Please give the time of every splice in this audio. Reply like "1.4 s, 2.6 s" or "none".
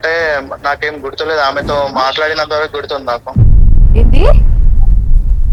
none